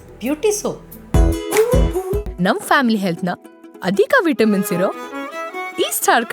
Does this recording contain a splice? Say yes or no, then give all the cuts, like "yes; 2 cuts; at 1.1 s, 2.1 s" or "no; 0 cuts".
yes; 1 cut; at 0.9 s